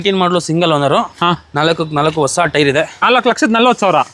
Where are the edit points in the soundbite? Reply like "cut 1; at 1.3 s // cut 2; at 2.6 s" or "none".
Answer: none